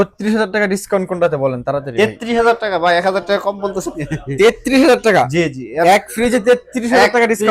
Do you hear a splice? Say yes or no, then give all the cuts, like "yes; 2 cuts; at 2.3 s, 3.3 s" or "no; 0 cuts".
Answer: no; 0 cuts